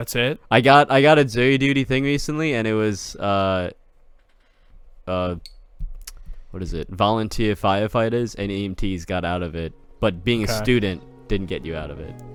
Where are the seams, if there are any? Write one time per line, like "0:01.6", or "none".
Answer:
none

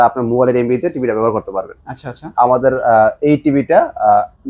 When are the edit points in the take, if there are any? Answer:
none

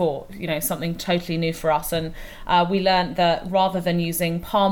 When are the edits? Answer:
none

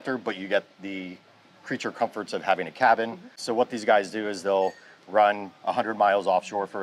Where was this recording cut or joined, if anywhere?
0:03.4

